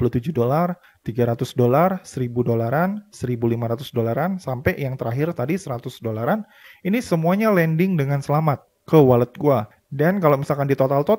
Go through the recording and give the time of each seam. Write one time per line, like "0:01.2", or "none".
none